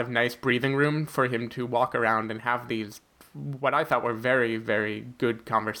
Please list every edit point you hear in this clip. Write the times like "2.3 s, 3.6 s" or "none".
none